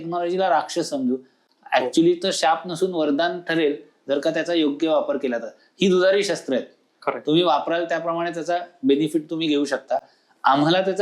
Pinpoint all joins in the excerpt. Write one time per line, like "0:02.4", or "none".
none